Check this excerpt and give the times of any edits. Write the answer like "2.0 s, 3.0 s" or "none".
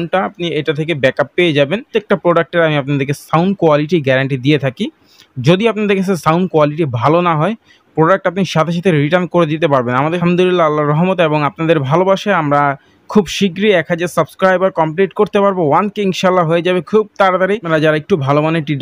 1.9 s, 10.2 s, 17.6 s